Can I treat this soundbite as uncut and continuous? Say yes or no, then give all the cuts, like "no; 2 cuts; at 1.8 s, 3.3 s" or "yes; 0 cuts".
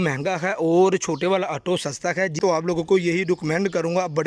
no; 1 cut; at 2.4 s